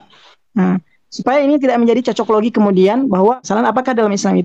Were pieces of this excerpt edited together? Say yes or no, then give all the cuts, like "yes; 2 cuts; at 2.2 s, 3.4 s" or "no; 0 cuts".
yes; 1 cut; at 3.5 s